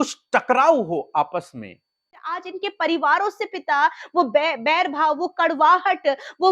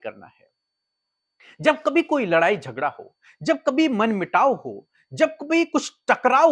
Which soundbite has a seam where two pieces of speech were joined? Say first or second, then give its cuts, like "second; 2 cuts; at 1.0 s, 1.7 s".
first; 1 cut; at 2.3 s